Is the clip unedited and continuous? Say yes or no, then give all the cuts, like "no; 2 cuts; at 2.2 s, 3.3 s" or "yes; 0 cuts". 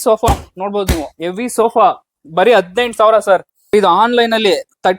no; 1 cut; at 3.7 s